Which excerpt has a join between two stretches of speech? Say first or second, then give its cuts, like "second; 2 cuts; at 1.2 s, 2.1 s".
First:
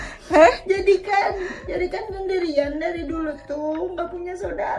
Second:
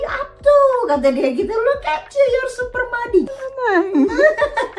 second; 1 cut; at 3.3 s